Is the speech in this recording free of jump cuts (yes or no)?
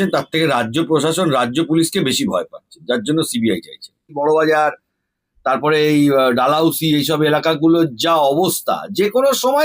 no